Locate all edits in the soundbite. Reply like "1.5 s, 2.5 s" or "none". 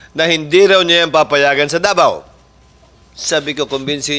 none